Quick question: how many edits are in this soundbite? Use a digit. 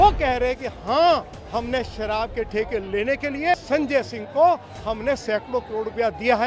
1